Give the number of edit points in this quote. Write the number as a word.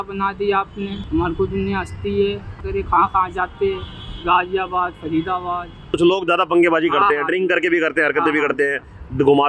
three